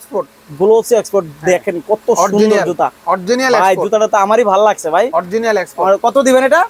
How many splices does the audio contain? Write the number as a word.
zero